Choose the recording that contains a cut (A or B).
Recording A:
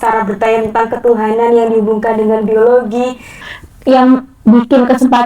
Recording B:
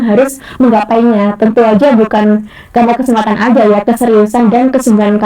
A